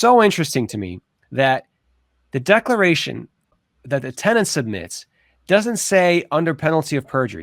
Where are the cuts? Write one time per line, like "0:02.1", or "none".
none